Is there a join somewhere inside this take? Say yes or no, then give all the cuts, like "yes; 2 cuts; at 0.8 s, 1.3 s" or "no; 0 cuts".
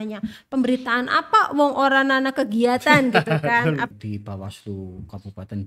yes; 1 cut; at 3.9 s